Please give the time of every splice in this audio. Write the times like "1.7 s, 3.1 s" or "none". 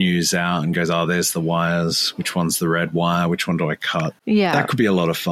4.2 s